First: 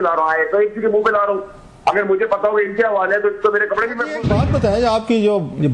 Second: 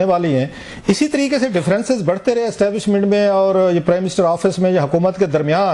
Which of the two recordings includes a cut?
first; 1 cut; at 4.2 s

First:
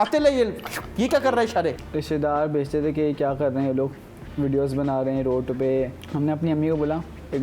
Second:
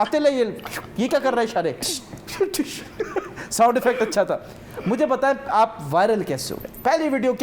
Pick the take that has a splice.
first; 2 cuts; at 1.8 s, 6.0 s

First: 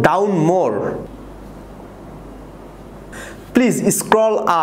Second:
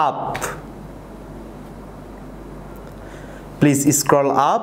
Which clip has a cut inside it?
first; 2 cuts; at 1.1 s, 3.1 s

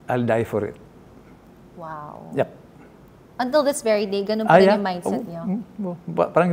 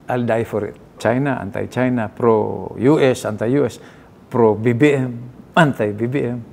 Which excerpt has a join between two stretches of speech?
second; 1 cut; at 1.0 s

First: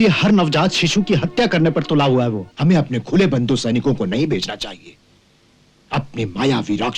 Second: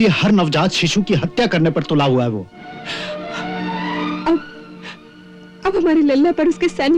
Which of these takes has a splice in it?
first; 1 cut; at 2.5 s

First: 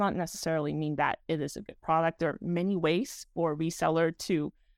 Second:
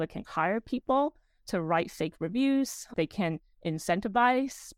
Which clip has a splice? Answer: second; 1 cut; at 2.9 s

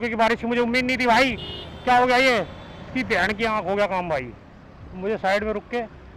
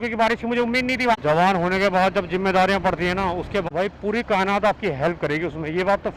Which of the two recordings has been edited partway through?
second; 2 cuts; at 1.1 s, 3.6 s

